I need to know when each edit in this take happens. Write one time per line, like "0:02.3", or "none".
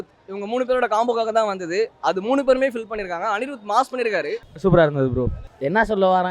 0:04.5
0:05.4